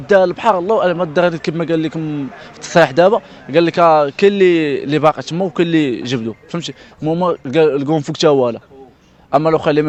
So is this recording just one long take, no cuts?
yes; 0 cuts

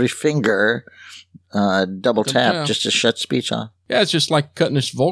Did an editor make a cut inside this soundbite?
yes; 1 cut; at 3.7 s

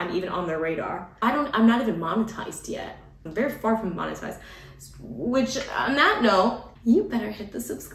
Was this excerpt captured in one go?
no; 3 cuts; at 1.2 s, 3.3 s, 6.7 s

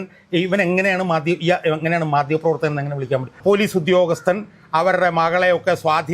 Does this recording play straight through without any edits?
no; 1 cut; at 3.4 s

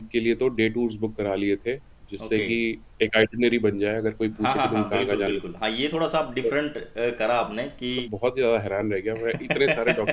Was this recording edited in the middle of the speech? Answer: yes; 1 cut; at 8.1 s

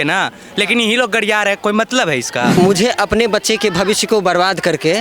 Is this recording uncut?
no; 1 cut; at 2.5 s

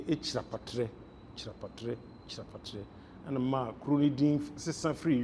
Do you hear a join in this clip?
no; 0 cuts

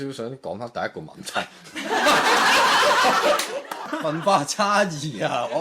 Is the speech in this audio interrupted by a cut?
yes; 1 cut; at 3.9 s

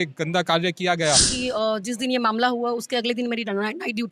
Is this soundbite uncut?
no; 1 cut; at 1.3 s

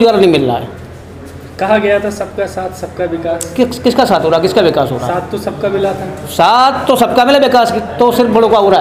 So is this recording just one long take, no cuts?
yes; 0 cuts

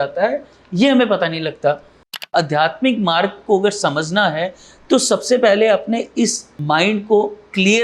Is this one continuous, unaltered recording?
no; 2 cuts; at 2.2 s, 6.5 s

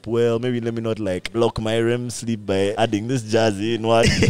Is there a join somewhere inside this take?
yes; 2 cuts; at 1.2 s, 2.8 s

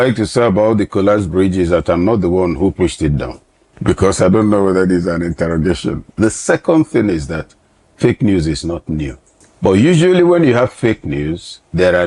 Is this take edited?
no; 0 cuts

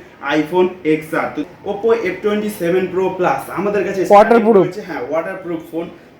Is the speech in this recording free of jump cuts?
no; 1 cut; at 1.4 s

